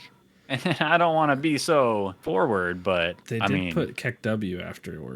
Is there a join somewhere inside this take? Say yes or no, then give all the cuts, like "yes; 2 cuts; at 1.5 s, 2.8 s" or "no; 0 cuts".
yes; 2 cuts; at 2.2 s, 3.2 s